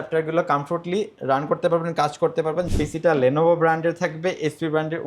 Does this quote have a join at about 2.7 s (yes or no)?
yes